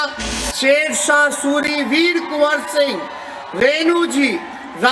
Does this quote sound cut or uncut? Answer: uncut